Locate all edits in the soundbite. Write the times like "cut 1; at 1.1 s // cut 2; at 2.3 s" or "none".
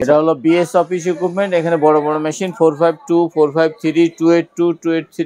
none